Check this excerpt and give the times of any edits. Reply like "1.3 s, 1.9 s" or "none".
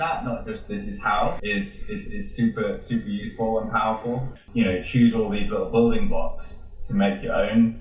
4.4 s